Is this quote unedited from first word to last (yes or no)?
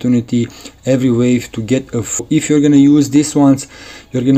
no